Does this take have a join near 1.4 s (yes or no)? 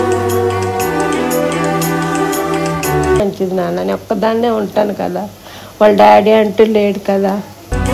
no